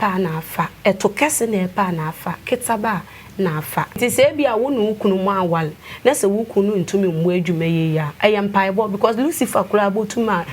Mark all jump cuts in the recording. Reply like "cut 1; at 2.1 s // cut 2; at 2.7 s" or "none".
cut 1; at 4.0 s

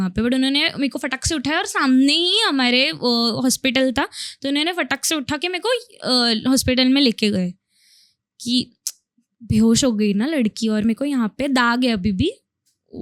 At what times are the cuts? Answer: none

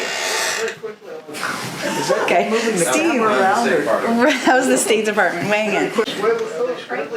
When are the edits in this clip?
cut 1; at 6.1 s

